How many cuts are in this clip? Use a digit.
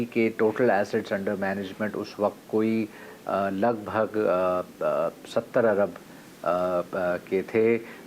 0